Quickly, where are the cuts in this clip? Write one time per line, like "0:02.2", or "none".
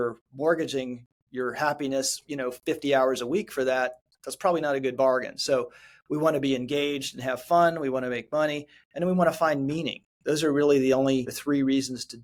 none